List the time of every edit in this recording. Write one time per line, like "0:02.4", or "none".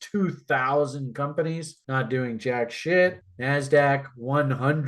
0:01.7
0:03.3